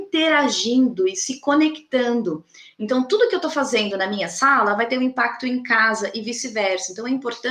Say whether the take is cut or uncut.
uncut